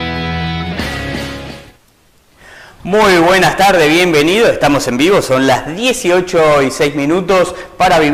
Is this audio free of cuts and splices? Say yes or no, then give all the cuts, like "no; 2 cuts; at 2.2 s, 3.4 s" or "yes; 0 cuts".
yes; 0 cuts